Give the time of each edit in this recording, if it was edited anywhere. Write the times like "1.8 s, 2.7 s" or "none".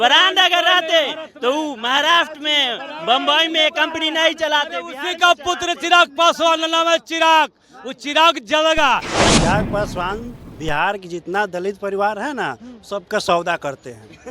9.3 s